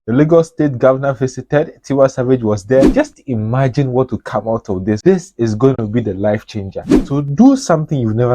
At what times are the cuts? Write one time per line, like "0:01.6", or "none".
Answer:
0:02.9